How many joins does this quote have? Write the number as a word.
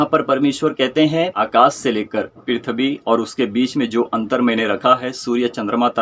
one